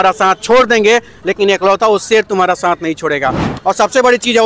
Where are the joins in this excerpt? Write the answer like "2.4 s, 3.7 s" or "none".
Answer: 3.5 s